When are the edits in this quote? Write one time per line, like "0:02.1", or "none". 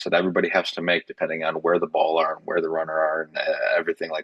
none

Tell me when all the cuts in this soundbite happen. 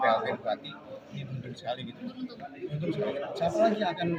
none

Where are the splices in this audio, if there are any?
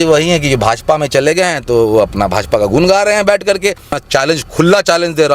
0:04.0

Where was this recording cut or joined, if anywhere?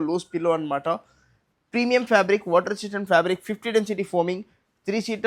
none

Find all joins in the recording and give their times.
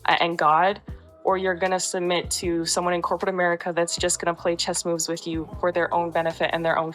0:05.5

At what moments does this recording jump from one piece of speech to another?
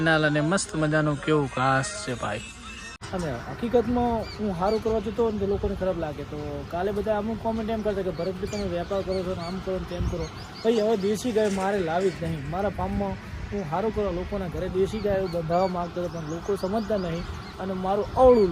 0:03.0

